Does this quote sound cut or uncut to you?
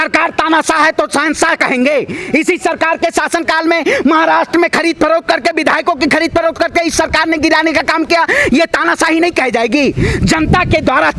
uncut